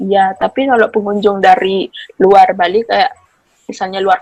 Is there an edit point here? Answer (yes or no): no